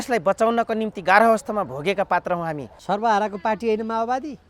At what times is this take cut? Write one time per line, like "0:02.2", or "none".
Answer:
0:02.7